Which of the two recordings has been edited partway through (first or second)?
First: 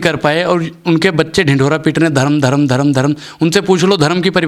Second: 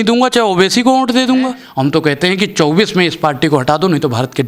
second